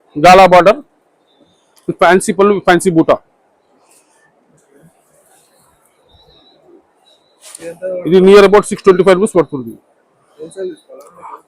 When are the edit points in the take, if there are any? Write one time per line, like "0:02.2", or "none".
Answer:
none